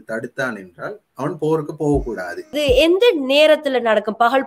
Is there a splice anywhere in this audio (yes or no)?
yes